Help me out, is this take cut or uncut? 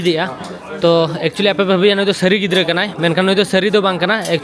uncut